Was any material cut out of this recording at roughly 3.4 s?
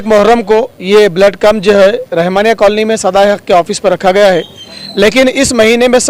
no; 1 cut; at 4.8 s

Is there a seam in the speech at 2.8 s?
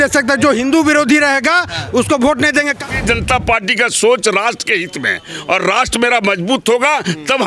yes; 1 cut; at 2.8 s

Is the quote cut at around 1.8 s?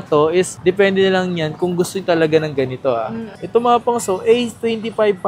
no; 1 cut; at 3.3 s

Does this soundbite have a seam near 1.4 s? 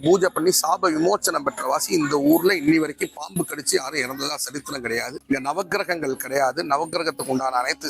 no; 1 cut; at 5.1 s

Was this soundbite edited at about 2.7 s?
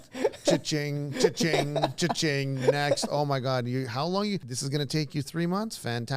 no; 1 cut; at 4.5 s

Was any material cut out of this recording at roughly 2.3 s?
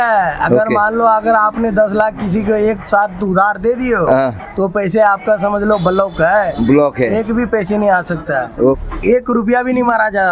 no; 1 cut; at 8.8 s

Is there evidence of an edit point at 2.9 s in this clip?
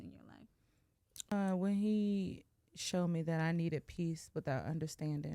no; 1 cut; at 1.3 s

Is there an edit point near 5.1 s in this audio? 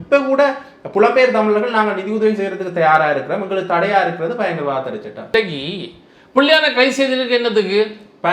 yes; 1 cut; at 5.1 s

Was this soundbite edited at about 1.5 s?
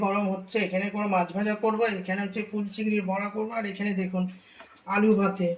no; 0 cuts

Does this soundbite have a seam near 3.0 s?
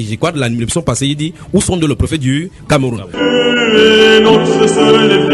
yes; 1 cut; at 3.0 s

